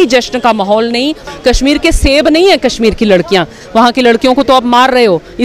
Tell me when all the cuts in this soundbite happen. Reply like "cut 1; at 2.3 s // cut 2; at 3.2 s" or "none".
cut 1; at 1.3 s // cut 2; at 3.6 s

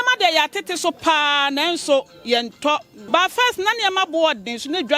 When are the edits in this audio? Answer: cut 1; at 2.9 s

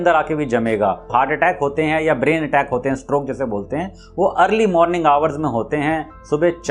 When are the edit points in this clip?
cut 1; at 1.1 s

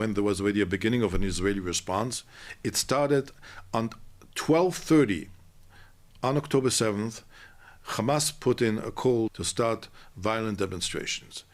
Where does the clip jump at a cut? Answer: cut 1; at 9.4 s

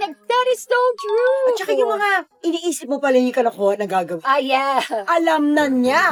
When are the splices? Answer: none

